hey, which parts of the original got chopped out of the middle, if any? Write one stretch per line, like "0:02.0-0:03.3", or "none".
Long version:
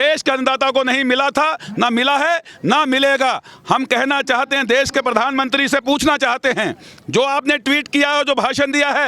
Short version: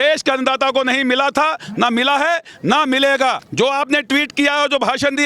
0:03.4-0:07.0